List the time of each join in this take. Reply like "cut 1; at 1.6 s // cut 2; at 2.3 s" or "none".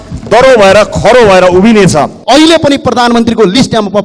cut 1; at 2.2 s

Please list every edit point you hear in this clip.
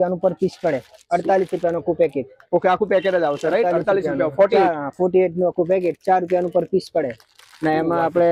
none

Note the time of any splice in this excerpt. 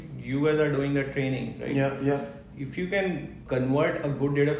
cut 1; at 3.4 s

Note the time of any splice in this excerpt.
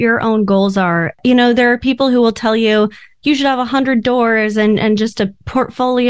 cut 1; at 1.1 s

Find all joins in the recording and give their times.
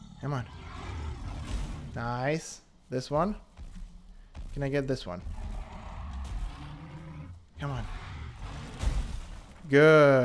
none

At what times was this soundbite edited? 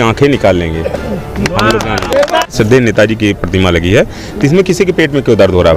cut 1; at 2.5 s

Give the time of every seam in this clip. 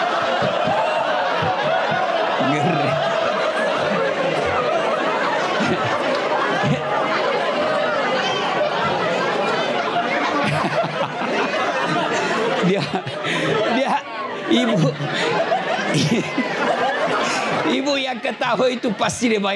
none

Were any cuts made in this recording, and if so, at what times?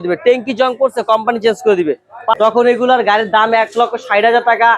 cut 1; at 2.3 s

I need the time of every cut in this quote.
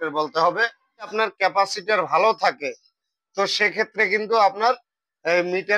cut 1; at 1.1 s

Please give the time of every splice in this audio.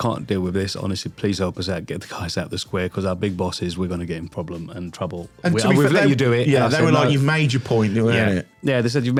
none

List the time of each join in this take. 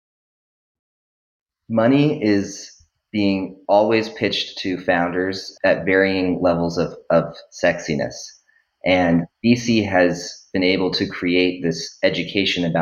cut 1; at 5.4 s

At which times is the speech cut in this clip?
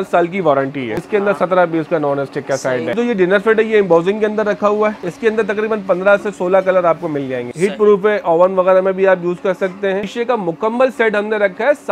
cut 1; at 1.0 s // cut 2; at 2.9 s // cut 3; at 5.1 s // cut 4; at 7.5 s // cut 5; at 10.1 s

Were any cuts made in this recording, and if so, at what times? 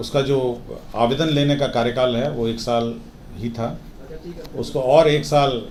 none

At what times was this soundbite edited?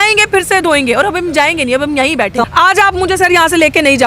cut 1; at 2.4 s

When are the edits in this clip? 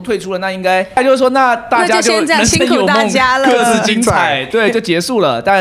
cut 1; at 1.0 s // cut 2; at 4.5 s

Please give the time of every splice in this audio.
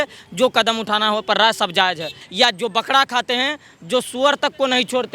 cut 1; at 2.2 s

